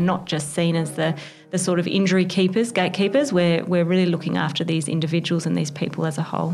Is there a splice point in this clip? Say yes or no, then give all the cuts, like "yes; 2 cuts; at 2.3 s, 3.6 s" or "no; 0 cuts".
no; 0 cuts